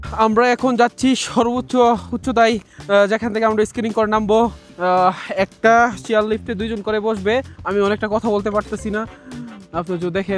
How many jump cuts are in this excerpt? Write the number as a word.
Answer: three